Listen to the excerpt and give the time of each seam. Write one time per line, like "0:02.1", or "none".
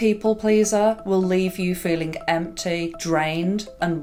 none